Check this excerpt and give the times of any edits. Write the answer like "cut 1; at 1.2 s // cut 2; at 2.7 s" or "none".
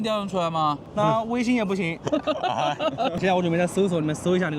cut 1; at 0.8 s // cut 2; at 3.2 s